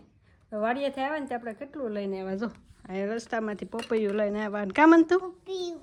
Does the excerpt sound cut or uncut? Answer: uncut